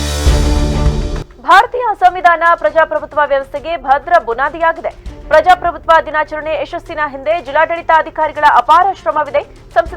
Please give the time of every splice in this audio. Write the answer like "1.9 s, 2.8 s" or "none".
1.3 s

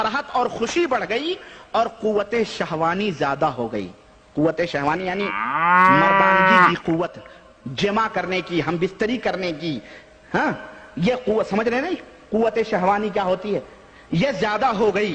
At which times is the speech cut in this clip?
none

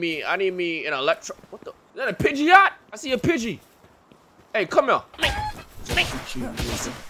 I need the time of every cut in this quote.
none

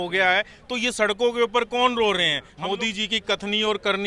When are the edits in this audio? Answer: 2.4 s

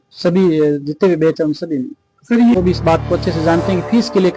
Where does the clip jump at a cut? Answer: 2.6 s

